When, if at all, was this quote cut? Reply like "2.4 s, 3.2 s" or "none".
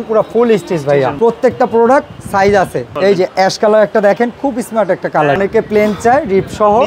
1.1 s, 2.8 s, 5.4 s